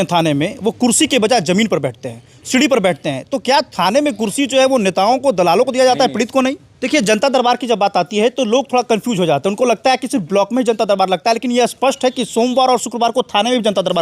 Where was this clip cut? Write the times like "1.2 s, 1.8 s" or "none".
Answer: 6.7 s